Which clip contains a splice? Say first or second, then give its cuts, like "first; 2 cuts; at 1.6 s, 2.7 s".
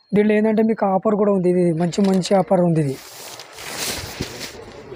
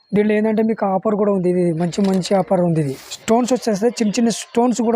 second; 1 cut; at 3.1 s